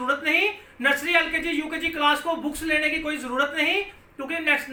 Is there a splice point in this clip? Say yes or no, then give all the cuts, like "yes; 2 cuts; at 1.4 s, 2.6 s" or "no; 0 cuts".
no; 0 cuts